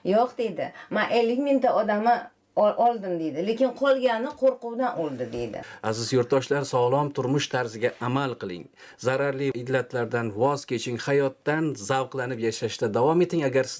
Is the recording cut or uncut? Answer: cut